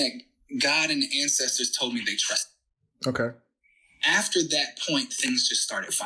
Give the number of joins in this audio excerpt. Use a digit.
0